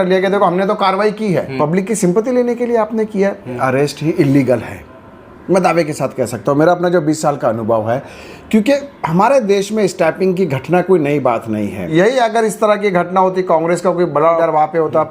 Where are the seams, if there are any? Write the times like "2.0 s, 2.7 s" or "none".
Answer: 1.5 s, 3.6 s, 11.9 s, 14.4 s

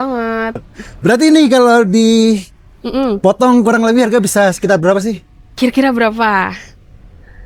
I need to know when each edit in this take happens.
none

